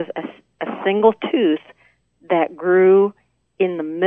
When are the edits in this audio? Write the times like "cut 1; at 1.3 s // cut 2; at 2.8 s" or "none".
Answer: none